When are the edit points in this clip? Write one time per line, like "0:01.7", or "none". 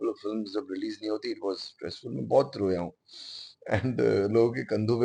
none